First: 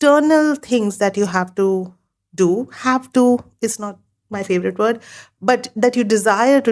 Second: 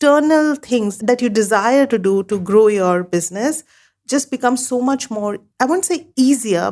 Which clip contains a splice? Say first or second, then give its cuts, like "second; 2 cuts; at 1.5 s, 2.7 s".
second; 1 cut; at 0.9 s